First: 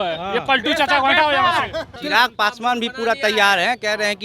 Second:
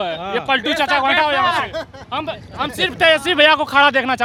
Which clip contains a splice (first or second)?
first